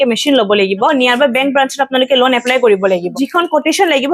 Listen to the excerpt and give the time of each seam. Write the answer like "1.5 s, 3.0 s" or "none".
0.9 s, 3.1 s